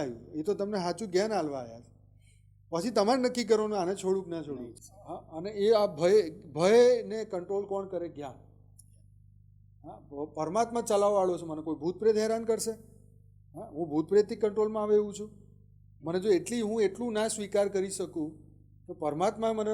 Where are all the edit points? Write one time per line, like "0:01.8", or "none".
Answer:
0:04.8